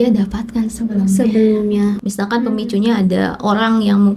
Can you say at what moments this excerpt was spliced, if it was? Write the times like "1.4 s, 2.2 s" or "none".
2.0 s

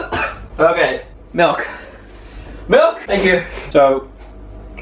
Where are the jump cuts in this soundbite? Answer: 1.1 s, 3.7 s

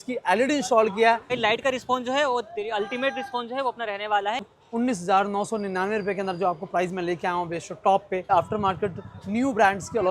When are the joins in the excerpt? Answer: 1.3 s, 4.5 s, 8.3 s

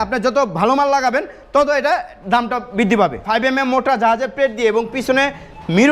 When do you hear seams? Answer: 3.2 s

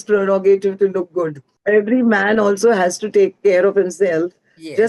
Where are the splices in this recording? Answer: 1.5 s

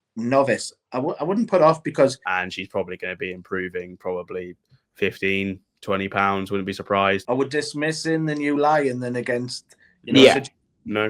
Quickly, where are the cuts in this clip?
2.3 s, 7.2 s

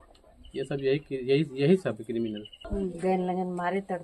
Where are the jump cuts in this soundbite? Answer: 2.7 s

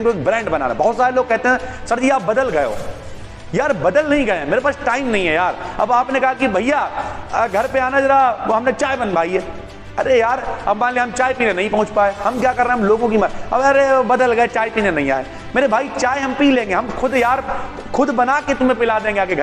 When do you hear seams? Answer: none

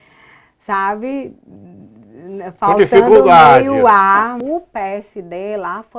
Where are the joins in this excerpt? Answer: 4.4 s

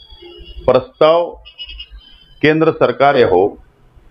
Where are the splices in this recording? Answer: 3.2 s

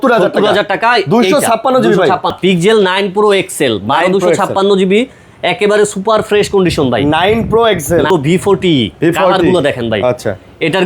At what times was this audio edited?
2.3 s, 8.1 s

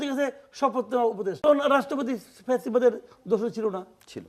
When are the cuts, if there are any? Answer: 1.4 s

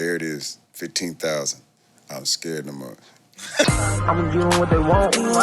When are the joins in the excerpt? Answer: 3.6 s

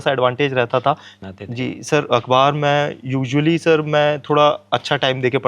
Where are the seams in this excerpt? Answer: 1.1 s

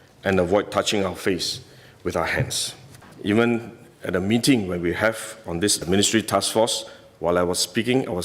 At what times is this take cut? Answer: 3.1 s

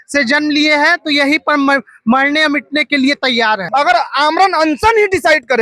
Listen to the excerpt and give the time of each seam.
3.7 s

